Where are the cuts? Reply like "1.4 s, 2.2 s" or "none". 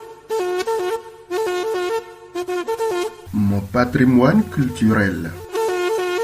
3.2 s

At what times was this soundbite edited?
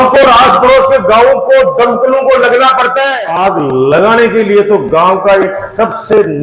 3.1 s

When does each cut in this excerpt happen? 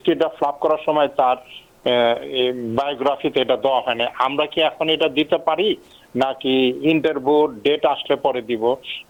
none

